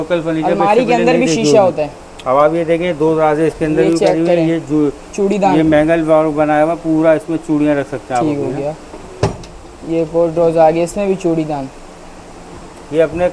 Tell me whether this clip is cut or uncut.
uncut